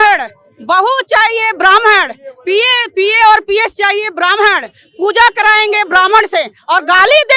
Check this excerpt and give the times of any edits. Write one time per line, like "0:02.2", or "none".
none